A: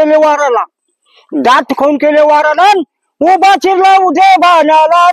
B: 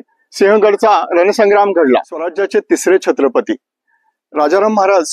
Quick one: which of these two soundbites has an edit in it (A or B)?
B